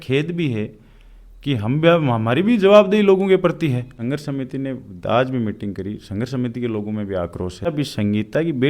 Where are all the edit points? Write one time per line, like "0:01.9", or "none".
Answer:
0:03.9
0:07.7